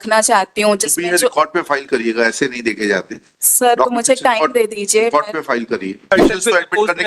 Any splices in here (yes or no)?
yes